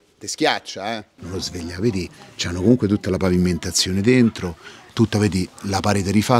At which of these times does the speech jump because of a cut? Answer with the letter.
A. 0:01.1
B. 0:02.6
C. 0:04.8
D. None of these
A